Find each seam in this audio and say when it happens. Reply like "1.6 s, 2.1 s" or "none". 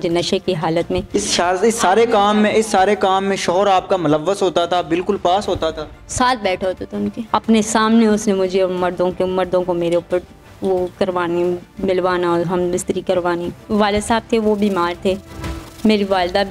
7.2 s, 13.6 s